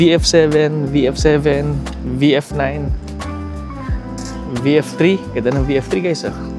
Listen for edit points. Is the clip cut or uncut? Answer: cut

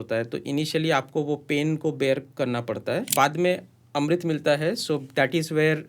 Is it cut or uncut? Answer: cut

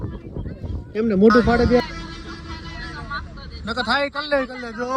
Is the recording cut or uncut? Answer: cut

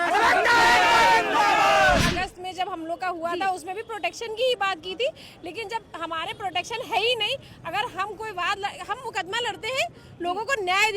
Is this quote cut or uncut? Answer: cut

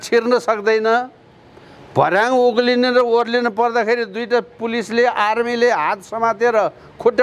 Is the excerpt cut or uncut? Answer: uncut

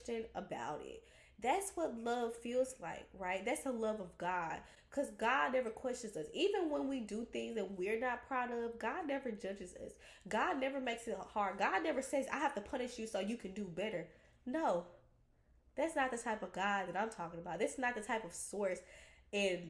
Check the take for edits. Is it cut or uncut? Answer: uncut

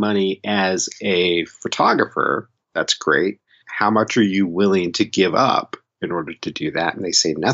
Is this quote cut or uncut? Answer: cut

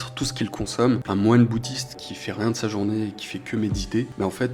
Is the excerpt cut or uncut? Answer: cut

